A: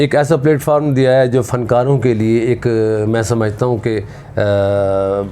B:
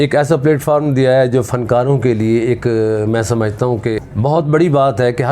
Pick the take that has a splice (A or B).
B